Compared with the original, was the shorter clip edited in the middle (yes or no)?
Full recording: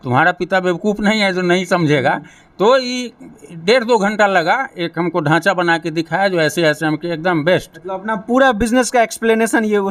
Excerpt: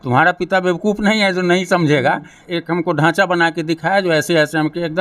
yes